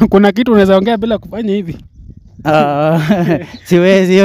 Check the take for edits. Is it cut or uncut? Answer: uncut